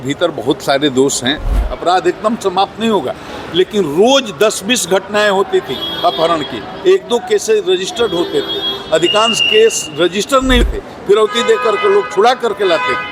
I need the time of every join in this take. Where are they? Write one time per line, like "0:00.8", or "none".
0:01.6
0:10.6